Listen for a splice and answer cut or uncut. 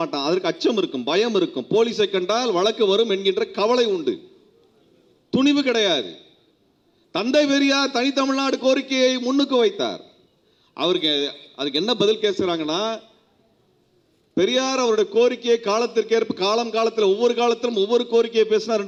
uncut